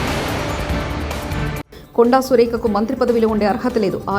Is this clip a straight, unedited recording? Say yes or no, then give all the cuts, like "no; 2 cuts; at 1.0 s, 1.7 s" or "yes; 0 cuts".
yes; 0 cuts